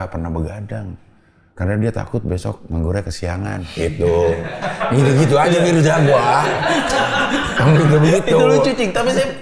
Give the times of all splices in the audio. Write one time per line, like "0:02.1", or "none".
none